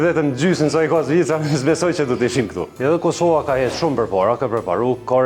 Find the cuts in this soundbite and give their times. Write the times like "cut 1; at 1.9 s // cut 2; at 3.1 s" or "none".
none